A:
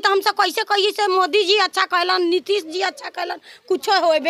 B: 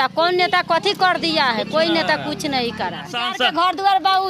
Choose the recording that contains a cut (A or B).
B